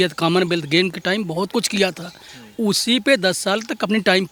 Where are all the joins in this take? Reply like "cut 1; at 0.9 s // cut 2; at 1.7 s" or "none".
none